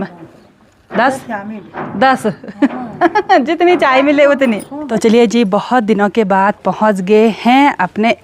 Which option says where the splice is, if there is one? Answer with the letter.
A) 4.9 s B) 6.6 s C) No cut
A